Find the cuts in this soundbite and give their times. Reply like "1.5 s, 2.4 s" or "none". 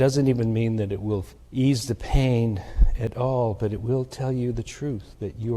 1.4 s